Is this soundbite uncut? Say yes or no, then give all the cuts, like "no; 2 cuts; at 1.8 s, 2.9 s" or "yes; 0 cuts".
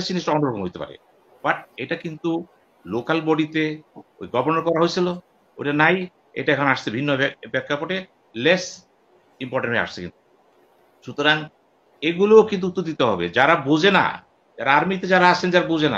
yes; 0 cuts